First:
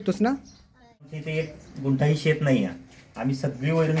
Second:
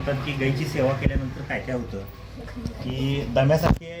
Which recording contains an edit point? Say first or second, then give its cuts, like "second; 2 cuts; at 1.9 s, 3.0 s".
first; 1 cut; at 1.2 s